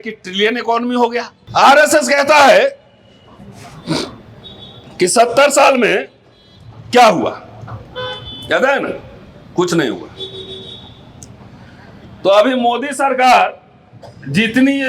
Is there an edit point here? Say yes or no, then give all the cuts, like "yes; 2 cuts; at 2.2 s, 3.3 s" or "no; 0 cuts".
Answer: yes; 1 cut; at 1.4 s